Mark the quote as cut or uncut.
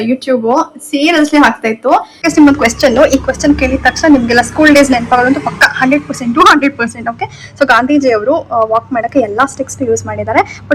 cut